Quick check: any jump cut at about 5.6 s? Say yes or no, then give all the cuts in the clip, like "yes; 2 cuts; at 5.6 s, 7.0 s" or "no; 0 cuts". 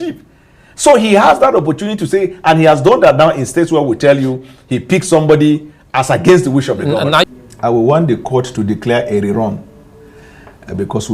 no; 1 cut; at 7.3 s